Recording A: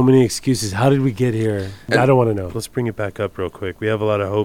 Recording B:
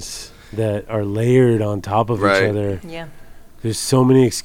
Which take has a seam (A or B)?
A